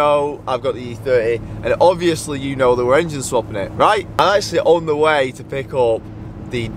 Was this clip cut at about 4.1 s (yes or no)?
yes